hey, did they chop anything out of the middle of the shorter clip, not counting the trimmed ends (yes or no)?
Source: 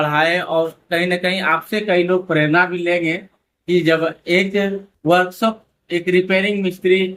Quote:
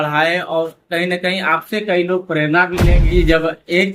yes